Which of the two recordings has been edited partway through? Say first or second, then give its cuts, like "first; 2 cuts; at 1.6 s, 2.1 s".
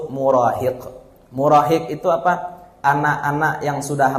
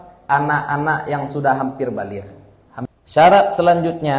second; 1 cut; at 2.9 s